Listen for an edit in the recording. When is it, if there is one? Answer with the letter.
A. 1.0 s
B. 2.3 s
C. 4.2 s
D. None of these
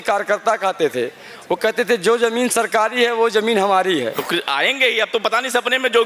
C